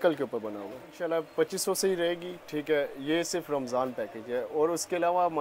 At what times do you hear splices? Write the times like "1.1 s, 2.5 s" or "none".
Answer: 0.9 s